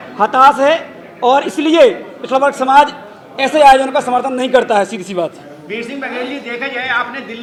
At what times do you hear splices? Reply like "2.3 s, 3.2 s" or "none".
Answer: none